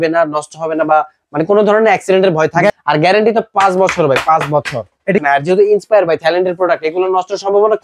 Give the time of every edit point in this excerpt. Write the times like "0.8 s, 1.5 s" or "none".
2.7 s, 5.2 s